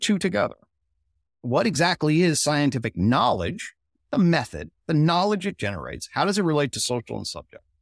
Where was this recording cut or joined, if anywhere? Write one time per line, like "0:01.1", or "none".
0:01.4